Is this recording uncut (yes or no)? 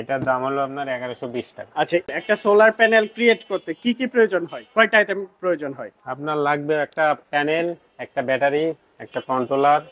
no